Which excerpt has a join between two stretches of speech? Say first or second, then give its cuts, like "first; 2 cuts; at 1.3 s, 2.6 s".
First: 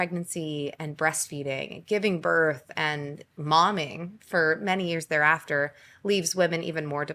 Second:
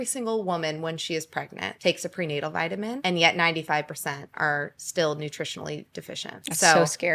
second; 3 cuts; at 1.6 s, 3.0 s, 4.3 s